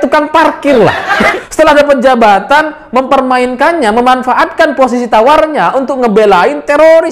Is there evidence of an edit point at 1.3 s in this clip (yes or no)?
yes